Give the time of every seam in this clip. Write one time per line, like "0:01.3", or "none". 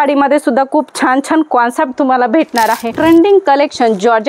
0:02.9